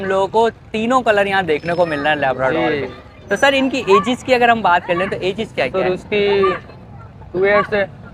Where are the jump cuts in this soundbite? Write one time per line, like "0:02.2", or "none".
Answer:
none

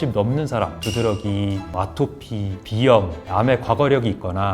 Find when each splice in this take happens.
0:03.2

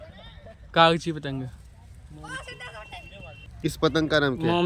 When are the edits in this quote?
0:03.8

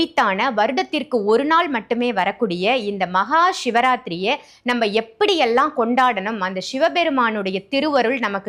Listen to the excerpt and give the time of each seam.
none

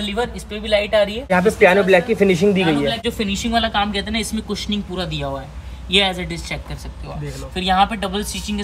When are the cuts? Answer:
0:01.3
0:03.0

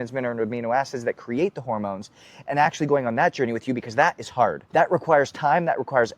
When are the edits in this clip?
0:04.6

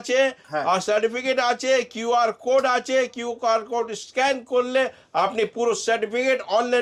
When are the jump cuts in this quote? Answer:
none

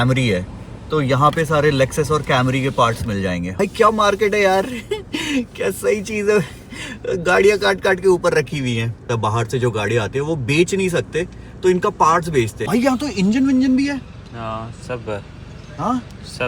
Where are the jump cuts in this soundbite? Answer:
0:03.5
0:09.1
0:12.6

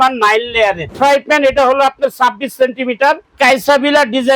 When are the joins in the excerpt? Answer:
0:00.9
0:03.3

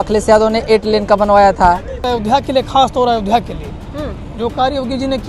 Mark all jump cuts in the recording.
0:02.1

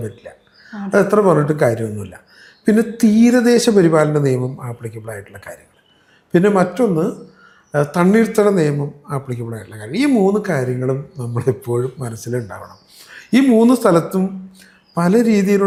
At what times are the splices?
none

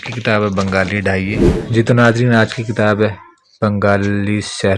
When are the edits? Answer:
0:01.5

